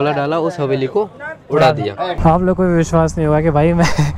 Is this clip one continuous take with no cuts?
no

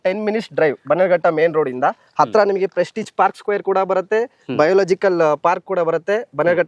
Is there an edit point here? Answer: no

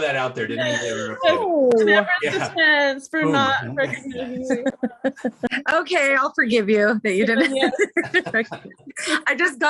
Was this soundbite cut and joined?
yes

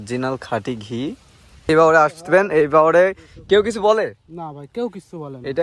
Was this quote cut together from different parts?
yes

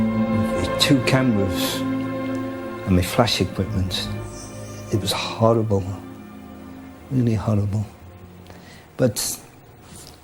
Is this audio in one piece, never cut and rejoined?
yes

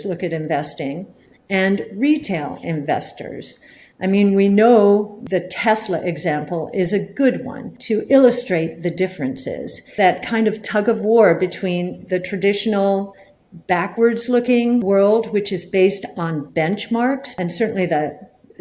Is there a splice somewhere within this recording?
yes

